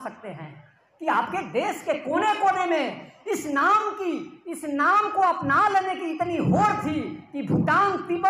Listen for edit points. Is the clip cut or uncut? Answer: uncut